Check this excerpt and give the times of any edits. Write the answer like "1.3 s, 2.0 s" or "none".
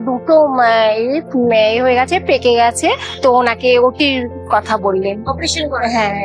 none